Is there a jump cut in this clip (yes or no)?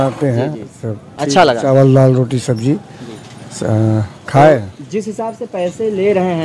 no